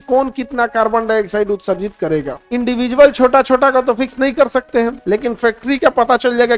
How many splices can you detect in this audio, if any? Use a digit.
2